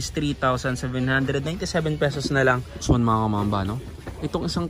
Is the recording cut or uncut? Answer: cut